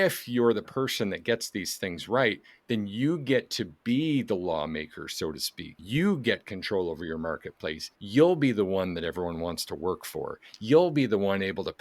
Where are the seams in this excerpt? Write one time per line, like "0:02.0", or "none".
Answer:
0:05.8
0:07.9